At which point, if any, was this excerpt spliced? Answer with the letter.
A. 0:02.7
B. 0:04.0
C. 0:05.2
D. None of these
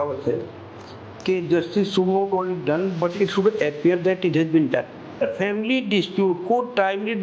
C